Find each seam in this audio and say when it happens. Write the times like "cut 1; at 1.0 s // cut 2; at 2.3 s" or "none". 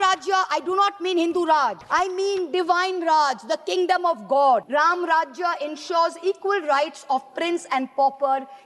cut 1; at 1.8 s // cut 2; at 4.7 s